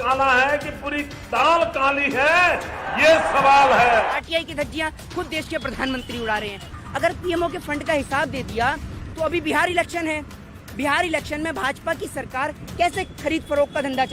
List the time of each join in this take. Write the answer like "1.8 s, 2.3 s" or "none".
4.2 s, 6.7 s